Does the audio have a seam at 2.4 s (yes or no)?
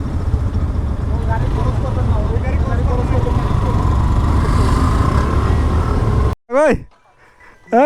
no